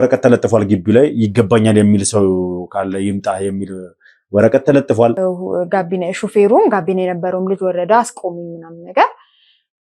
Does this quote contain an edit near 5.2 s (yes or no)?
yes